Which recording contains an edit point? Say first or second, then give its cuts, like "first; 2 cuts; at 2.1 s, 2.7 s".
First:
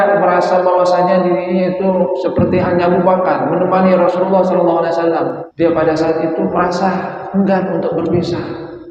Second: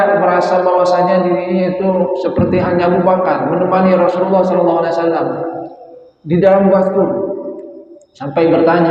first; 1 cut; at 5.4 s